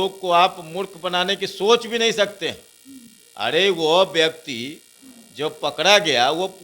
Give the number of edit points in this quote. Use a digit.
0